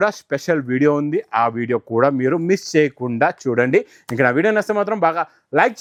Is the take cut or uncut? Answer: uncut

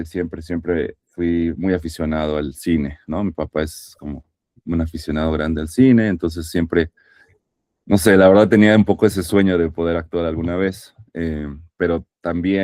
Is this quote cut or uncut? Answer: uncut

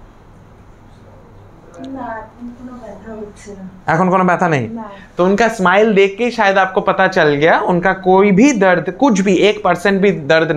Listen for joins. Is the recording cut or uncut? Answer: uncut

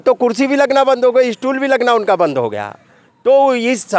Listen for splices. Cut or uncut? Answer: uncut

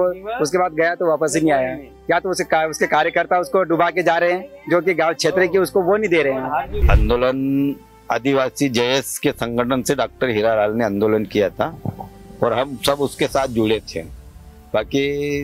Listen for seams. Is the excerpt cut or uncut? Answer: cut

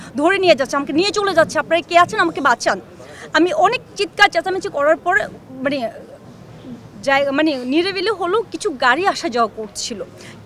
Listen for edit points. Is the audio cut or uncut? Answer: uncut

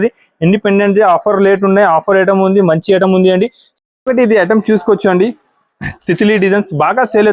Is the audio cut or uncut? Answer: cut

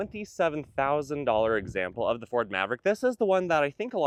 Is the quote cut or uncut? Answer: uncut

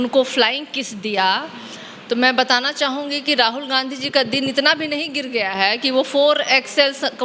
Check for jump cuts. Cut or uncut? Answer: uncut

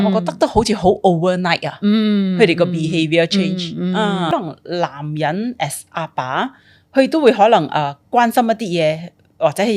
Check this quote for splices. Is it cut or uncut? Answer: cut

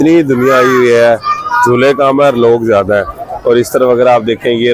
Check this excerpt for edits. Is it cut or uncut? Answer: uncut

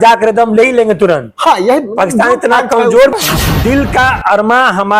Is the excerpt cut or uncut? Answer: cut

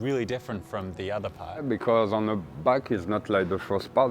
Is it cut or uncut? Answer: cut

